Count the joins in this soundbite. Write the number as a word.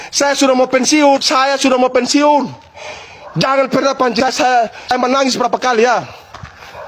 zero